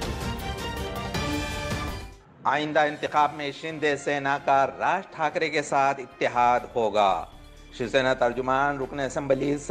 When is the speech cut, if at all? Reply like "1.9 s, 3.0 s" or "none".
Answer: 2.1 s